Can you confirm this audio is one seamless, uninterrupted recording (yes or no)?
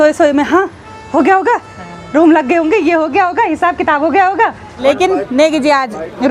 no